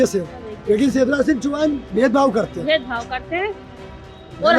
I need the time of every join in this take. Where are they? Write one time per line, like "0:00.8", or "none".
none